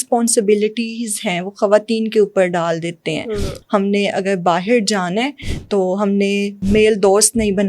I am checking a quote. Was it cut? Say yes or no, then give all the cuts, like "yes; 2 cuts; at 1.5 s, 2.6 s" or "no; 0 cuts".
yes; 2 cuts; at 3.5 s, 6.6 s